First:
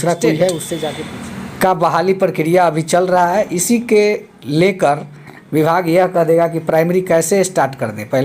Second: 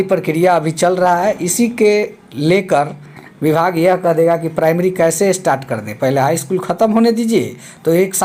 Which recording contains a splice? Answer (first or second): first